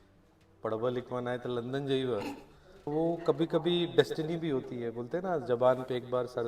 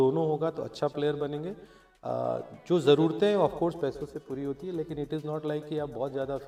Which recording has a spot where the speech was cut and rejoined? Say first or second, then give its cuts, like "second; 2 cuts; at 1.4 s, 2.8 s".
first; 1 cut; at 2.9 s